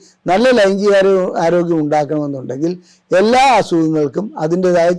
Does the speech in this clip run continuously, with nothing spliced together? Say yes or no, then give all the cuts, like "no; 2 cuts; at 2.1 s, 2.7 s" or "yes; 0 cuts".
yes; 0 cuts